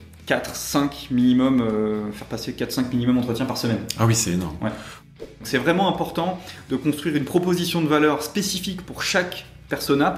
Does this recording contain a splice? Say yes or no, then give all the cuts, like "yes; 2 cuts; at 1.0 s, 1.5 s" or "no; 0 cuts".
yes; 1 cut; at 5.1 s